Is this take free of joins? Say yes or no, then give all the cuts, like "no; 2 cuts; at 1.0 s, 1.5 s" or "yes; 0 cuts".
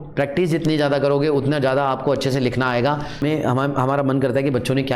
no; 1 cut; at 3.2 s